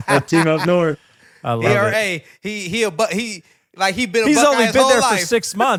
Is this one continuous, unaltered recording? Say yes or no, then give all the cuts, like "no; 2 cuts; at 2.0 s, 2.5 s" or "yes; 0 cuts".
yes; 0 cuts